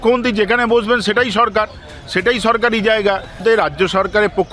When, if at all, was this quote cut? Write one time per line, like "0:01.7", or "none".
0:03.4